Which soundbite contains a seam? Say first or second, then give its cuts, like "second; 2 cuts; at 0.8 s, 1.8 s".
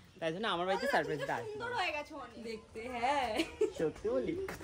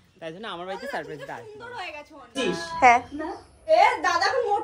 second; 1 cut; at 2.3 s